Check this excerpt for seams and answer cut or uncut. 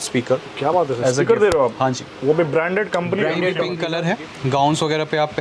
cut